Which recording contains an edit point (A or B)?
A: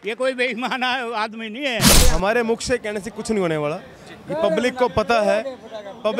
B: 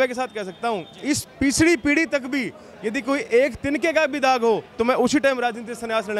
A